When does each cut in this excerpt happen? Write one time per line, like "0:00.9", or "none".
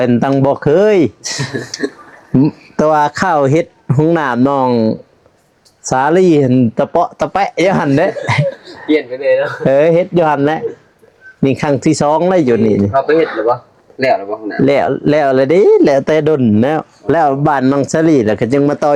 none